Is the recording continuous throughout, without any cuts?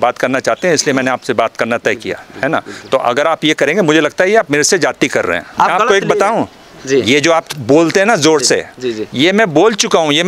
yes; 0 cuts

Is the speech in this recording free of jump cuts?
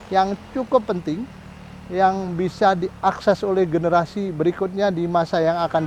yes; 0 cuts

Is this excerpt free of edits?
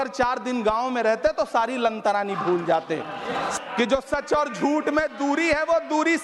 no; 1 cut; at 3.5 s

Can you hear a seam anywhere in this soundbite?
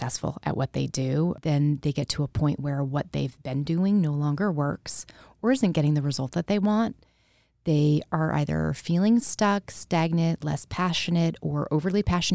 yes; 1 cut; at 1.4 s

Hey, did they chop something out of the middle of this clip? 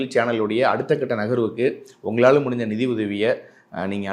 no; 0 cuts

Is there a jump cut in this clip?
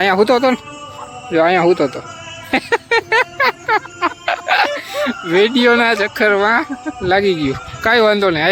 no; 0 cuts

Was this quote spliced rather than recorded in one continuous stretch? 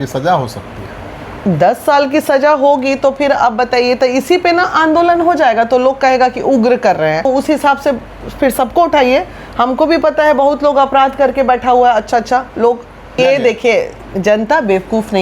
yes; 2 cuts; at 7.3 s, 13.2 s

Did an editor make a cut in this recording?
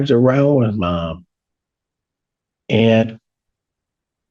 no; 0 cuts

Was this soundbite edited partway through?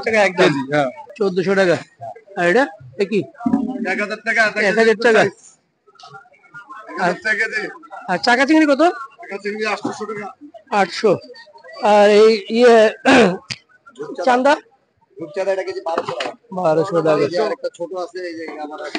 yes; 1 cut; at 1.0 s

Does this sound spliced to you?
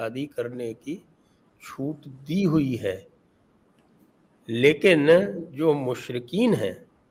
no; 0 cuts

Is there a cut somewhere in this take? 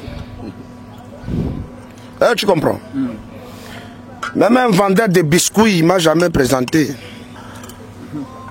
yes; 1 cut; at 7.3 s

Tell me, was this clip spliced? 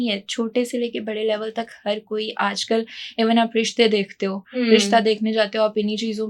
no; 0 cuts

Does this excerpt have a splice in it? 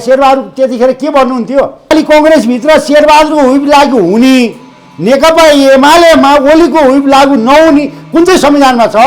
yes; 1 cut; at 1.9 s

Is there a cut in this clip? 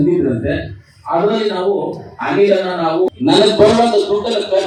no; 0 cuts

